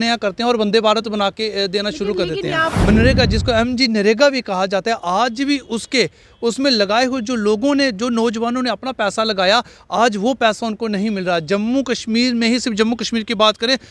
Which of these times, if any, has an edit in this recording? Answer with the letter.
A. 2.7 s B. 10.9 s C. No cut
A